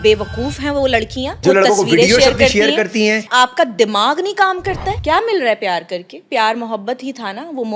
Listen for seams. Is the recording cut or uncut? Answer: cut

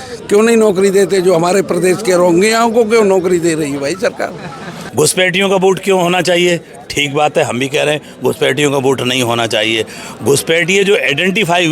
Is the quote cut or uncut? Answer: cut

